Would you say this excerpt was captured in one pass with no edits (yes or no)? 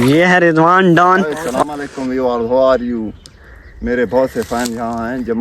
no